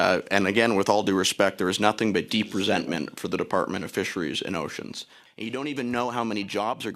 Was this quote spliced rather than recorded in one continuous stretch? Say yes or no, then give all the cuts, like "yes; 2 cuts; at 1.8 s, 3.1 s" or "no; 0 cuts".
yes; 1 cut; at 5.1 s